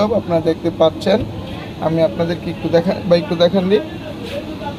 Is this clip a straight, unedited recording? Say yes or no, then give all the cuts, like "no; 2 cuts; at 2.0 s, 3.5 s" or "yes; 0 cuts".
yes; 0 cuts